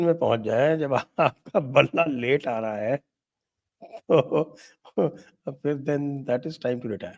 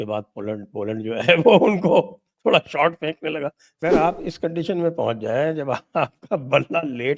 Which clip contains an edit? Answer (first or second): second